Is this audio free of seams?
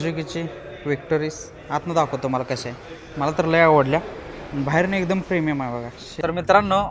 no; 1 cut; at 6.0 s

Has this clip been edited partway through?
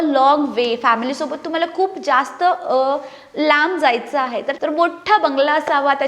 yes; 1 cut; at 4.5 s

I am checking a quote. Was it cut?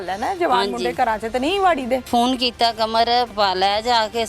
yes; 2 cuts; at 2.1 s, 3.3 s

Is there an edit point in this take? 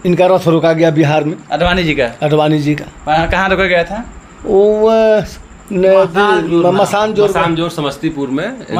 no; 0 cuts

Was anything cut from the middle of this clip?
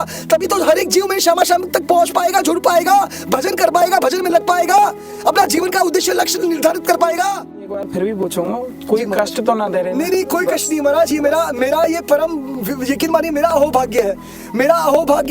yes; 1 cut; at 7.7 s

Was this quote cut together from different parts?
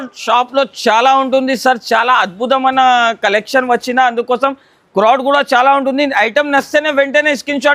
no; 0 cuts

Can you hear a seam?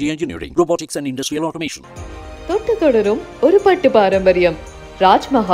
no; 0 cuts

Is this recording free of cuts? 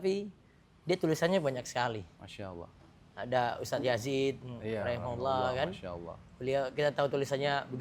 yes; 0 cuts

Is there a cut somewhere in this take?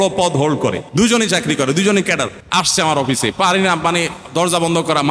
yes; 2 cuts; at 0.8 s, 2.4 s

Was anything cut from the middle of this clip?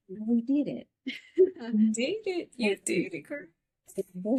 no; 0 cuts

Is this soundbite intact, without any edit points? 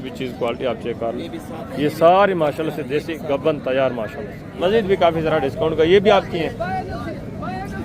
no; 1 cut; at 4.5 s

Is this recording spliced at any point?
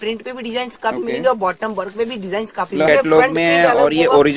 yes; 1 cut; at 2.9 s

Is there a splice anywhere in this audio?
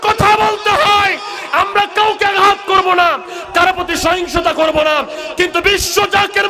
no; 0 cuts

